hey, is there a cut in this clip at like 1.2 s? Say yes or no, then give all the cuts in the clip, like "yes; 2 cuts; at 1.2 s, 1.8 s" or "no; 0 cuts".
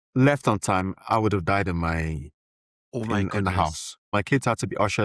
no; 1 cut; at 4.1 s